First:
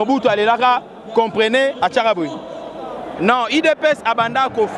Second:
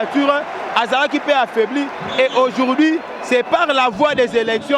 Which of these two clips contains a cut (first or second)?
first